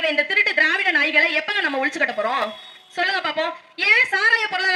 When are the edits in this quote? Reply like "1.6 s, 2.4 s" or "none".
none